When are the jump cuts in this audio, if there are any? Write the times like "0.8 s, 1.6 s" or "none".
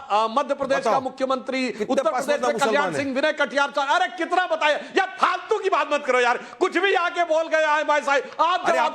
3.0 s